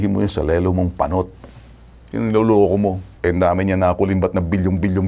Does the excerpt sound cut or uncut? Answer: uncut